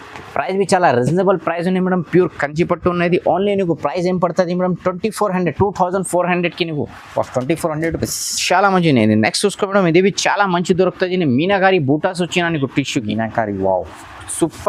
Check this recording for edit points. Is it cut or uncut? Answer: uncut